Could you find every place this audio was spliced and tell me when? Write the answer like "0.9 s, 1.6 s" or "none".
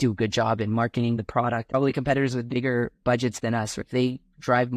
1.7 s, 3.8 s

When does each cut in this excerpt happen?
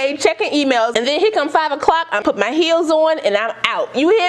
2.2 s

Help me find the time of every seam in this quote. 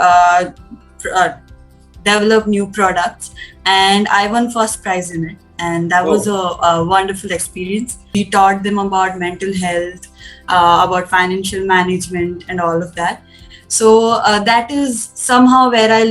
8.0 s

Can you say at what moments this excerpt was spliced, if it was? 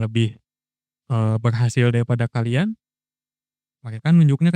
none

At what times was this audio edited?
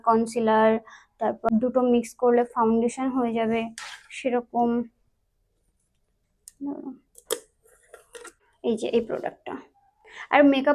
1.5 s, 8.4 s

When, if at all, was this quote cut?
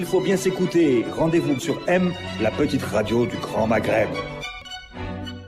4.5 s

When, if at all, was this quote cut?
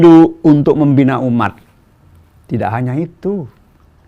none

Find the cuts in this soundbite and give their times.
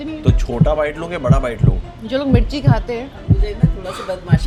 none

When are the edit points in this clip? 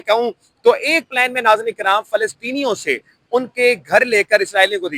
none

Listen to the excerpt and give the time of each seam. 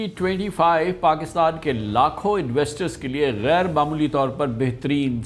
none

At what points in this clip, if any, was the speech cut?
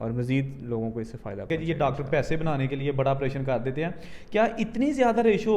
1.5 s

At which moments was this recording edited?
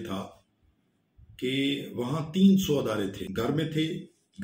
3.2 s

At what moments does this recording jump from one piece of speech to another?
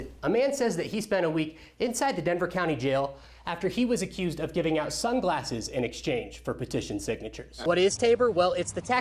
7.5 s

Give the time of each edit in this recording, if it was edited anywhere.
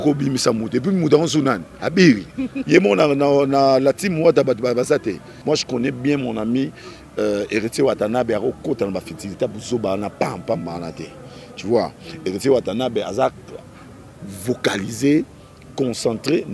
5.3 s

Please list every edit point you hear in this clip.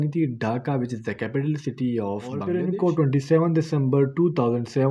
2.4 s

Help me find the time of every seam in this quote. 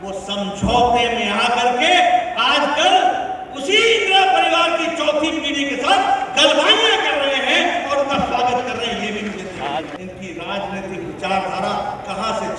9.9 s

